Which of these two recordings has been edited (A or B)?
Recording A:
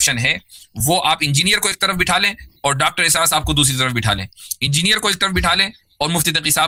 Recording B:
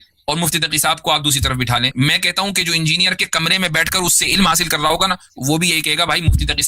B